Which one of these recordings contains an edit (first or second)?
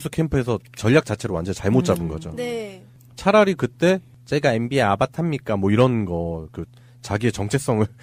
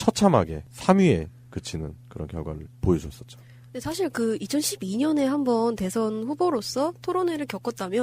second